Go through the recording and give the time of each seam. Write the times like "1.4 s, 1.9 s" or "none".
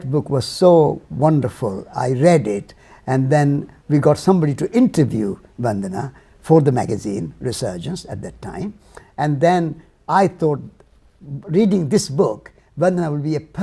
10.3 s